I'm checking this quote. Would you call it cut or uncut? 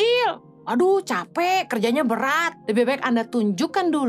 cut